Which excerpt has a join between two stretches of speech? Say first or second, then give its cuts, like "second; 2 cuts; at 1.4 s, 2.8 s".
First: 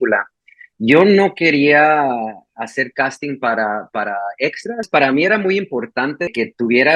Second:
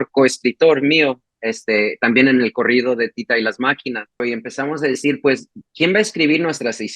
second; 1 cut; at 4.1 s